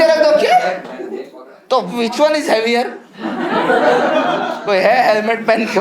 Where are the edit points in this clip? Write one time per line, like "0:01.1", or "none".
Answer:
0:04.6